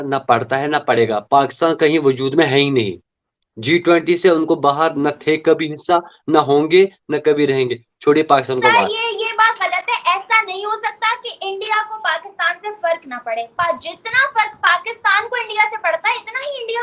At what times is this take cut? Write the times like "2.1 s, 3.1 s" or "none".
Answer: none